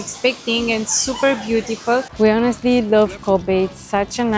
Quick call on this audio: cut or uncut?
cut